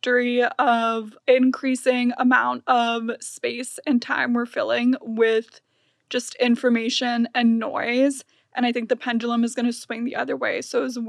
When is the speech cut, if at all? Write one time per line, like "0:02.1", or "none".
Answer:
0:01.1

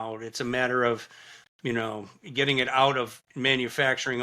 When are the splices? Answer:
0:03.2

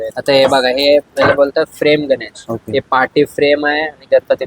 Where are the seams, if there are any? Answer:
none

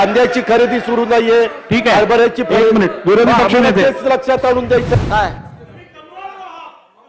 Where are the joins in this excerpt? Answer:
0:04.9

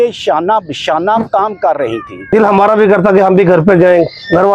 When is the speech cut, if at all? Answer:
0:02.3

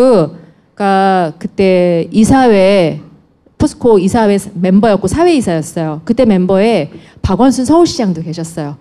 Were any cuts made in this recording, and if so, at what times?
0:03.8

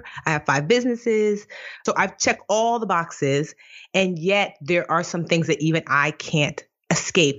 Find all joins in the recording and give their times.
0:01.8

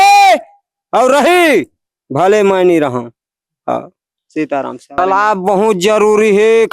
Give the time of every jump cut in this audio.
0:05.0

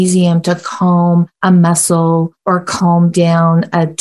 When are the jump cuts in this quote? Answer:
0:01.3
0:02.3

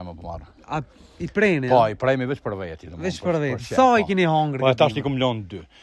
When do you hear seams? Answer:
none

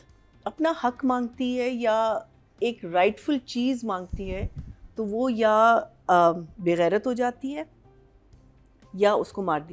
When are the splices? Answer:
none

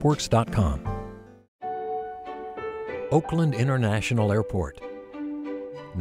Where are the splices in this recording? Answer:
0:01.7

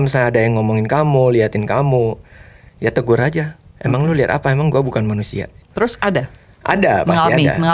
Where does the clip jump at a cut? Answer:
none

